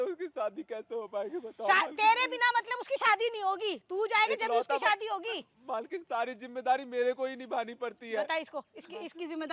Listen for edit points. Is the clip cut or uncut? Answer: uncut